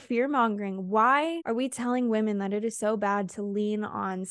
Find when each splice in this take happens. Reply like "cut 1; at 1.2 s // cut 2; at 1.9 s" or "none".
cut 1; at 1.4 s

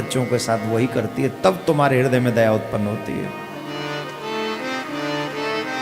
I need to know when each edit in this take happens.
none

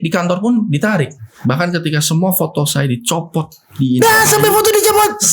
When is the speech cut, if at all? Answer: cut 1; at 1.2 s

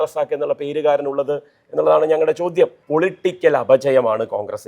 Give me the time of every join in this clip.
cut 1; at 2.8 s

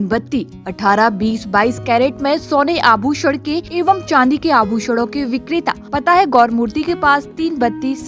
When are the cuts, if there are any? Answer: cut 1; at 3.7 s // cut 2; at 5.8 s

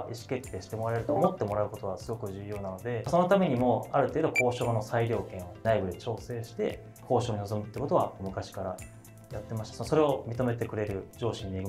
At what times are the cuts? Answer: none

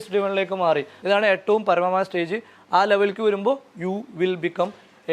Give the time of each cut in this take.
cut 1; at 0.9 s

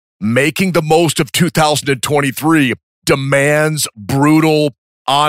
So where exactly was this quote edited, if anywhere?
cut 1; at 2.9 s

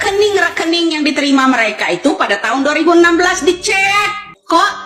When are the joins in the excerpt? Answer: none

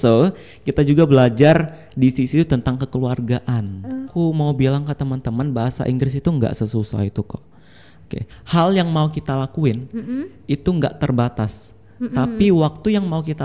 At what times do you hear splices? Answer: cut 1; at 4.1 s // cut 2; at 8.3 s

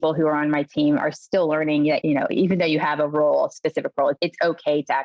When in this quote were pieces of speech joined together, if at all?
cut 1; at 2.0 s // cut 2; at 4.2 s

